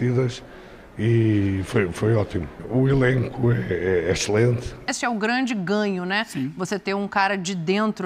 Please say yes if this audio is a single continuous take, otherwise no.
no